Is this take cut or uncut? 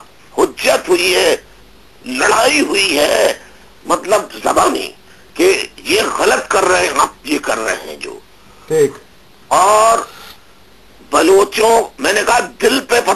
uncut